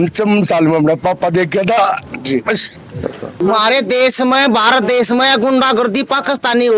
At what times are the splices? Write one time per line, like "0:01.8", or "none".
0:03.4